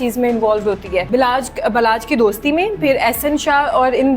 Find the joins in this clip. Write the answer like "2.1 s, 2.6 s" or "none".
1.1 s